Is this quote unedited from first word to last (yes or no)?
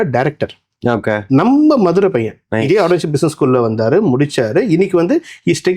no